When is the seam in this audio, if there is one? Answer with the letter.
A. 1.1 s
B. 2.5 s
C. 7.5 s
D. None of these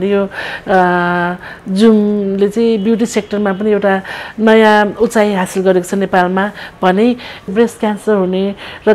C